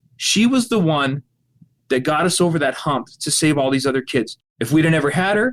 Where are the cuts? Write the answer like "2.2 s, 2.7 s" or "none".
4.3 s